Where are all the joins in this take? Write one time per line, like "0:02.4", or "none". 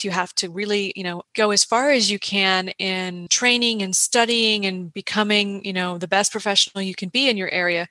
0:01.2
0:03.3